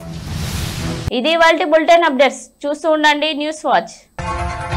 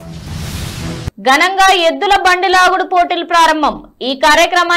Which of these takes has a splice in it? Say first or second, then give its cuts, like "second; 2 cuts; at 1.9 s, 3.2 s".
second; 1 cut; at 1.1 s